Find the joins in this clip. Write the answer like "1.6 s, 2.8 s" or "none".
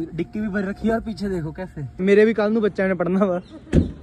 1.9 s